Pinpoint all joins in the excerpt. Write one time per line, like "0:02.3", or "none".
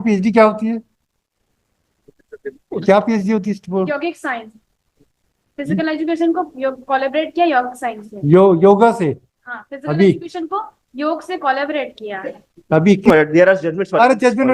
0:13.1

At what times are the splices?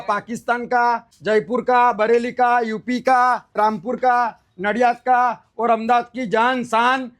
0:01.1
0:03.6

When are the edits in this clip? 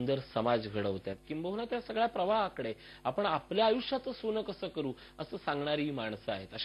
0:04.0

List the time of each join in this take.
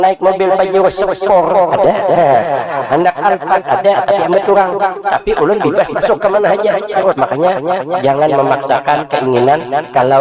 0:06.9

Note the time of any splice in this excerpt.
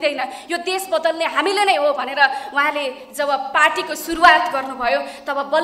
none

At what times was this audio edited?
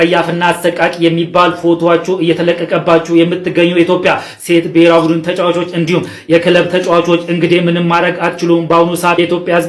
none

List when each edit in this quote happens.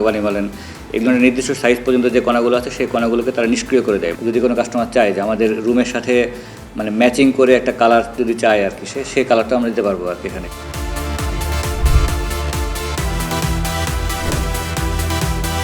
0:04.1
0:10.5

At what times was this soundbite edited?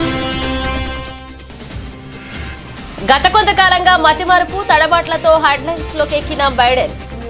0:02.6

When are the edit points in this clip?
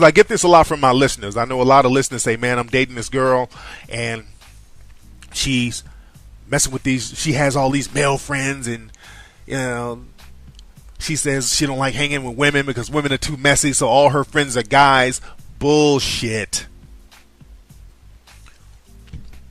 0:12.1

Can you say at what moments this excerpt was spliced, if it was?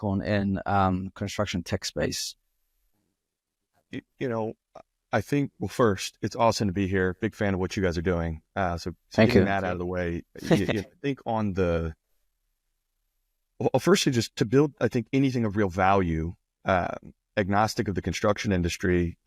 none

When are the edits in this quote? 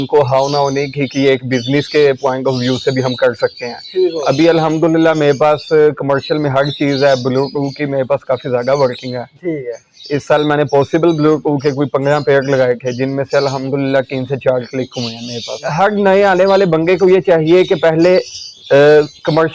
0:04.2
0:15.7

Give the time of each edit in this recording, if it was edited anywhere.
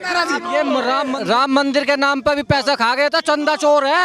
0:01.1

